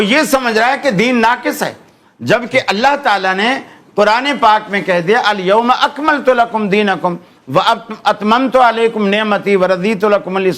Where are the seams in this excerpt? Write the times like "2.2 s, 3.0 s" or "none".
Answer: none